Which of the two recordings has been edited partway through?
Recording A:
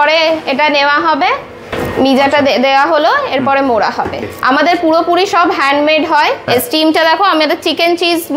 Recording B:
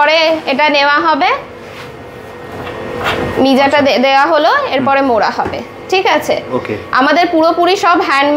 A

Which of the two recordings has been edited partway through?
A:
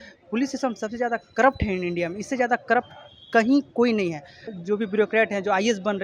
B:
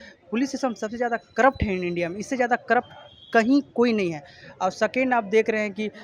A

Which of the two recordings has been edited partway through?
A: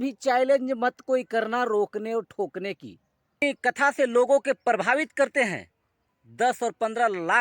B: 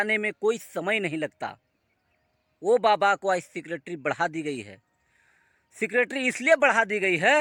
A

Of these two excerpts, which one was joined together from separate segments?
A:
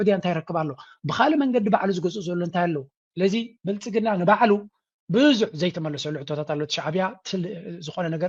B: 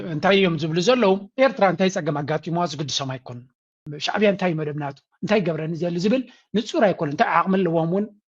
B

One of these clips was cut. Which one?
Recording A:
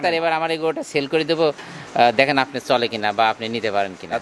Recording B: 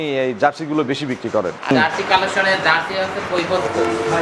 B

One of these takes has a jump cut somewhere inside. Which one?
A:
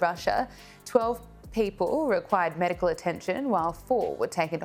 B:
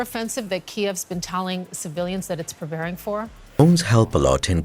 B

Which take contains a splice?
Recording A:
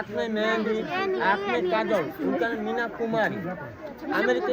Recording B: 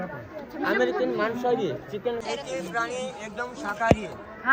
B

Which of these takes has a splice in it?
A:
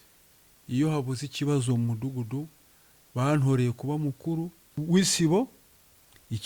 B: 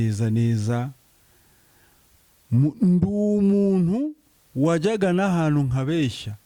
A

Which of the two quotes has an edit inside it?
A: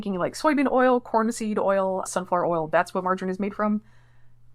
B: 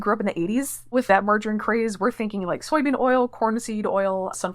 B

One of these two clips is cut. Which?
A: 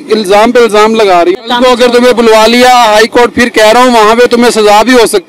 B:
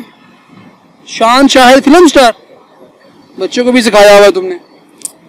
A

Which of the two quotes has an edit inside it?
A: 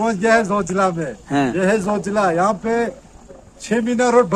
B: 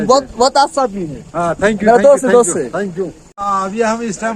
B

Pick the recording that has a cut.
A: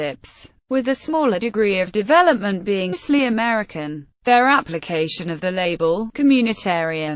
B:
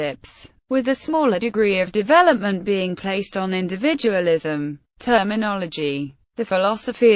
B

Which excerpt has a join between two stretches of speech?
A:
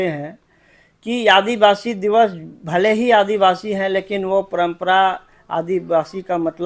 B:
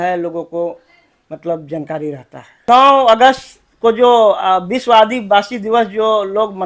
B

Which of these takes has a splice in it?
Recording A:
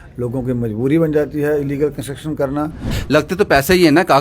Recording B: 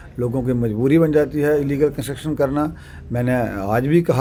A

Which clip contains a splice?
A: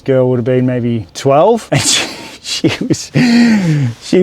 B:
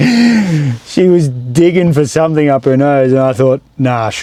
A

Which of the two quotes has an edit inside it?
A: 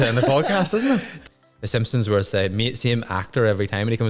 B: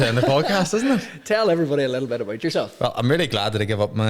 A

